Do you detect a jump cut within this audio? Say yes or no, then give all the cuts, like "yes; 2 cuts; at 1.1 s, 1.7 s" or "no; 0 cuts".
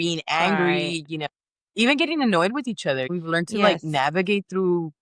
yes; 1 cut; at 3.1 s